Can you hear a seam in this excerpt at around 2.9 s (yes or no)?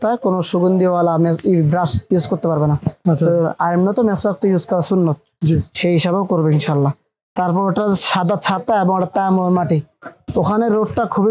no